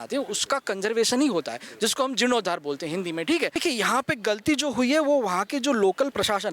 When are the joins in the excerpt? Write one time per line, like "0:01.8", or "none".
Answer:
0:03.6